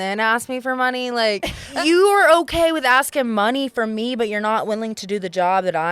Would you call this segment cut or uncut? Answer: cut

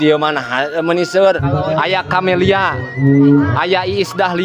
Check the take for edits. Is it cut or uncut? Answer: uncut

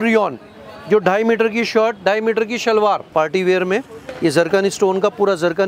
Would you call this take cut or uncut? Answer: cut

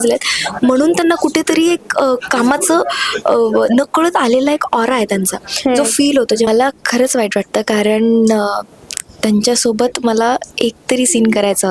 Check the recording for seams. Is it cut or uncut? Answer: cut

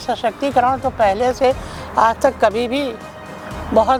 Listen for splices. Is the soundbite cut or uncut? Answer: uncut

